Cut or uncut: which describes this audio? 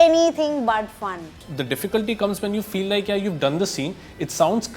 cut